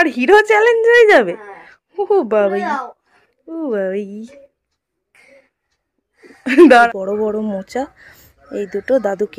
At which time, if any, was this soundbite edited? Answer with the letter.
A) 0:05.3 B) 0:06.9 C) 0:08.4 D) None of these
B